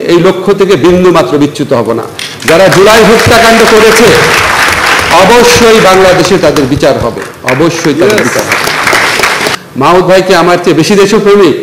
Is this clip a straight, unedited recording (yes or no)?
no